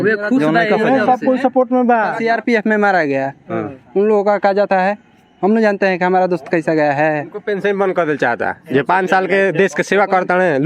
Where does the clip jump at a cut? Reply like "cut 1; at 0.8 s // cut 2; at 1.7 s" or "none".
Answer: cut 1; at 2.2 s // cut 2; at 7.4 s